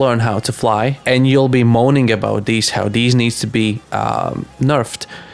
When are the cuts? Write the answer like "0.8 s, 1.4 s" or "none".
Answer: 1.0 s